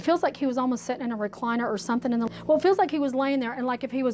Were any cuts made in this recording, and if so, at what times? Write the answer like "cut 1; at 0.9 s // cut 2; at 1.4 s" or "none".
cut 1; at 2.3 s